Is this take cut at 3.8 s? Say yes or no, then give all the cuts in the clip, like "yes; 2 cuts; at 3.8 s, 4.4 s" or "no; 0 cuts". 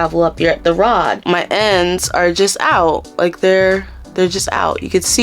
no; 1 cut; at 1.2 s